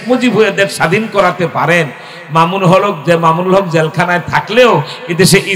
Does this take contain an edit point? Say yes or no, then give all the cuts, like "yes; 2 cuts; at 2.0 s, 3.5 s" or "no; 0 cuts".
no; 0 cuts